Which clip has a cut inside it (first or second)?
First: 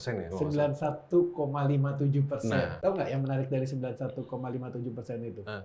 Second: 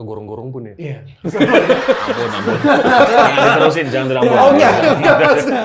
first